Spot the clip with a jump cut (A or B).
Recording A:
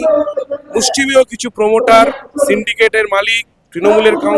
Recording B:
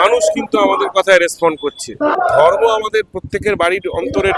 B